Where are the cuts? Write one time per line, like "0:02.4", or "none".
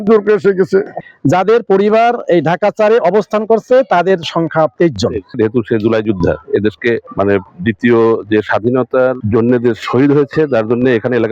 0:00.9
0:05.3
0:07.1
0:09.2

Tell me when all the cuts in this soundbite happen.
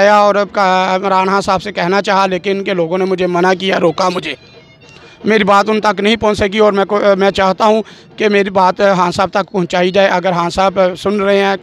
none

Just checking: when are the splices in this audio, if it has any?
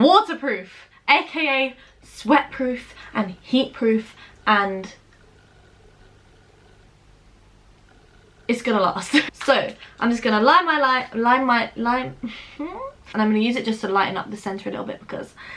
0:13.0

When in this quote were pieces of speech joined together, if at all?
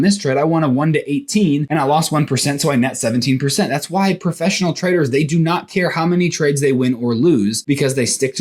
0:01.7
0:07.6

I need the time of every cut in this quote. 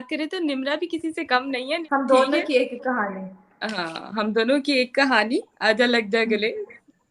0:01.7

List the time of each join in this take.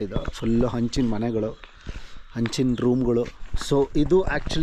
0:03.5

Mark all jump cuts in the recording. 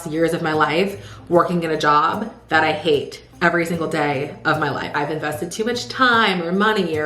0:04.9

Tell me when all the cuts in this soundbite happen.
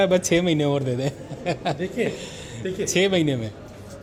none

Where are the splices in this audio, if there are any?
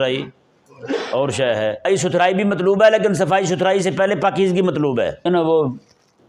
0:01.9
0:05.3

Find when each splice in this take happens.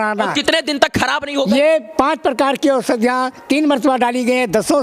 none

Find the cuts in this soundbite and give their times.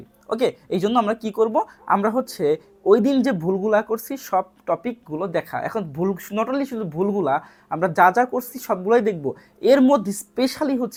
none

